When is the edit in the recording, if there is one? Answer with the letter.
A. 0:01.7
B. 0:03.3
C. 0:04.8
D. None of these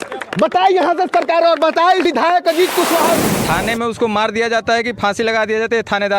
B